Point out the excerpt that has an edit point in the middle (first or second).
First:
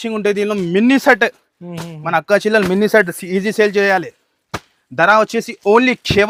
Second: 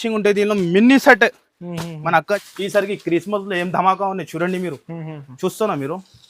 second